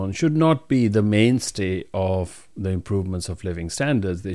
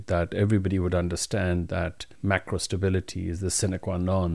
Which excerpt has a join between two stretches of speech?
second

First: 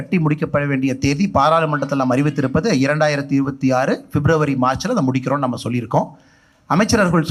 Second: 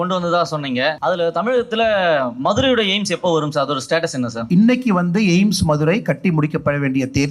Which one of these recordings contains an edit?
second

